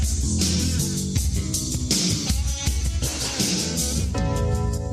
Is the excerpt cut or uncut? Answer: uncut